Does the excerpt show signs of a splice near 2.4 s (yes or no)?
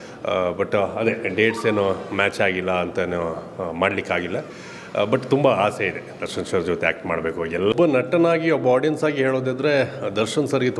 no